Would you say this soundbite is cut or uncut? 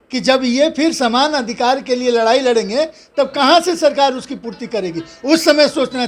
uncut